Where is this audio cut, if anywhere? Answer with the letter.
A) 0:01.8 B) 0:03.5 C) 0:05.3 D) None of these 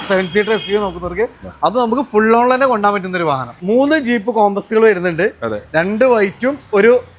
B